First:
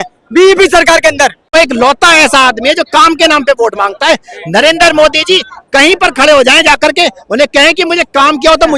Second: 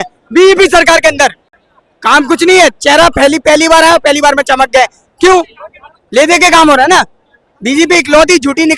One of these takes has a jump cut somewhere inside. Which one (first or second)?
first